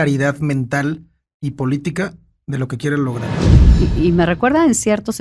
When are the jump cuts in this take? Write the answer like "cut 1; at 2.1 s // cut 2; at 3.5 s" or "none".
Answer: cut 1; at 3.6 s